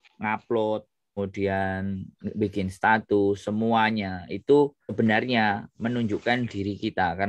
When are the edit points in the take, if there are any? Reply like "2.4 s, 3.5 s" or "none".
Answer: 1.2 s, 4.9 s

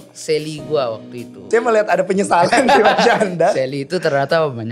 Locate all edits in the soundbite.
1.5 s

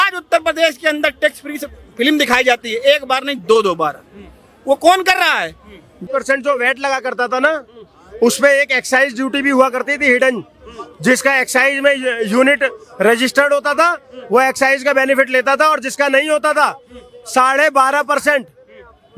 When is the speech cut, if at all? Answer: 6.0 s

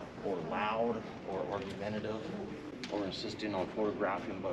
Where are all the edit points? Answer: none

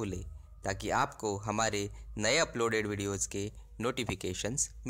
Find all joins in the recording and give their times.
2.0 s

